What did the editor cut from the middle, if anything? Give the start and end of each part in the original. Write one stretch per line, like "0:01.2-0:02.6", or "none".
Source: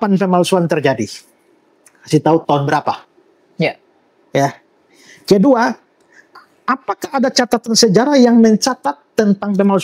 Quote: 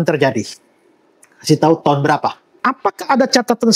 0:03.1-0:06.5